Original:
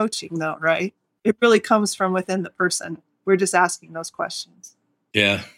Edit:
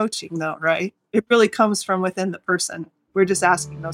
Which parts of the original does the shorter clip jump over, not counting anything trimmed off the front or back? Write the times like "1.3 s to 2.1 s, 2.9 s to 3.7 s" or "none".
1.0 s to 1.1 s